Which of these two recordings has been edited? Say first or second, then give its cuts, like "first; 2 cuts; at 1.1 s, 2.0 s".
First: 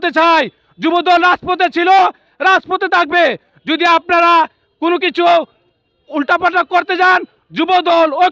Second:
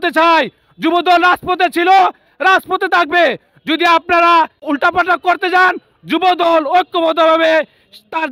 second; 1 cut; at 4.6 s